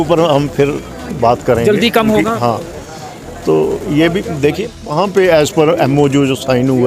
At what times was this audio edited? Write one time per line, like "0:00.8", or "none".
0:04.8